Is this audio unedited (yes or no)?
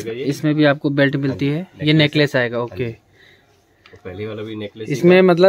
yes